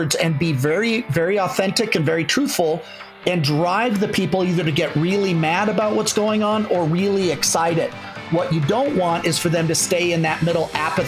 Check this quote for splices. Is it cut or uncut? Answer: uncut